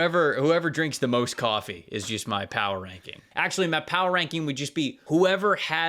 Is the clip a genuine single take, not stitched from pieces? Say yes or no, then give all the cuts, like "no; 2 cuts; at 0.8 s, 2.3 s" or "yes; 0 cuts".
no; 2 cuts; at 3.3 s, 5.0 s